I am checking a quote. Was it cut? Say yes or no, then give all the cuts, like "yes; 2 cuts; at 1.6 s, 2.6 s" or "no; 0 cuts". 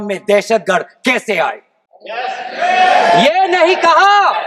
no; 0 cuts